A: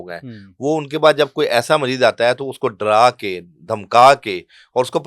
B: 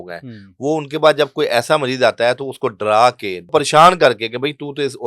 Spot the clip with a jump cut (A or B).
B